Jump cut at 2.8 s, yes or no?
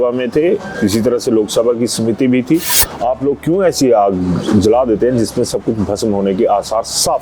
yes